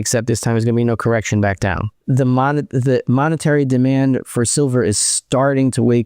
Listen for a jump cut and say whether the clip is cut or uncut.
cut